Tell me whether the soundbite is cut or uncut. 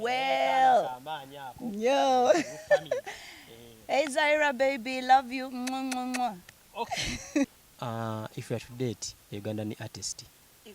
cut